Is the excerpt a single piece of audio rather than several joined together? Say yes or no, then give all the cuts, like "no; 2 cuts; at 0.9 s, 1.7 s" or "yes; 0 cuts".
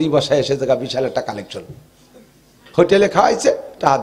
yes; 0 cuts